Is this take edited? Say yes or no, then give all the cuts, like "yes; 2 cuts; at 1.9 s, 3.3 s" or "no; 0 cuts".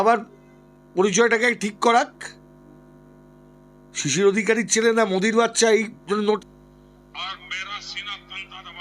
yes; 1 cut; at 6.4 s